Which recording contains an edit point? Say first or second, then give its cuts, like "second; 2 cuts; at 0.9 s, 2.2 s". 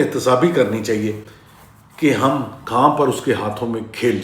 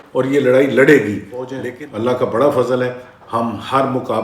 second; 1 cut; at 1.6 s